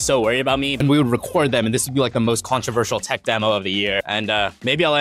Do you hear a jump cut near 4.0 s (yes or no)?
yes